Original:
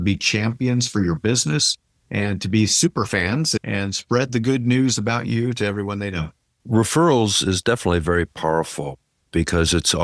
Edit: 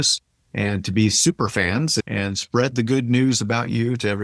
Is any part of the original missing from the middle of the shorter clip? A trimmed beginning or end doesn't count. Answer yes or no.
no